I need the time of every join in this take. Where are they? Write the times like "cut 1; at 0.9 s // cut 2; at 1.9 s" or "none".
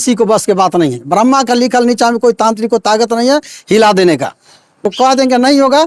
cut 1; at 4.8 s